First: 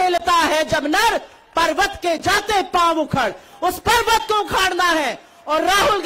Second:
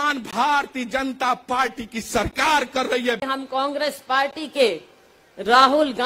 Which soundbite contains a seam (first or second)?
second